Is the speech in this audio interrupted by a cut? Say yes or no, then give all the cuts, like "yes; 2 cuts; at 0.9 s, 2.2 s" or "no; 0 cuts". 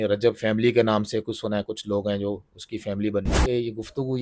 yes; 1 cut; at 3.3 s